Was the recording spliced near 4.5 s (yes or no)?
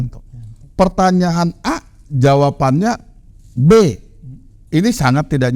yes